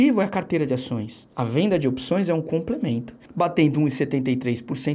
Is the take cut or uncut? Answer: cut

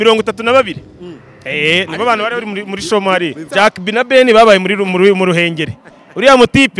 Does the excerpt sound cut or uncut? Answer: cut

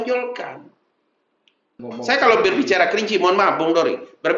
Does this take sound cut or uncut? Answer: cut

